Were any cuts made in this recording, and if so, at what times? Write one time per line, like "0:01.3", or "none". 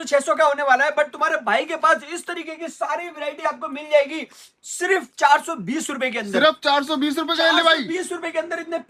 none